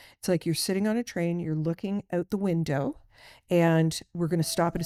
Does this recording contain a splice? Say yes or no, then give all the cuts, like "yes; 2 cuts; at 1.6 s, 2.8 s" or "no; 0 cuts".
no; 0 cuts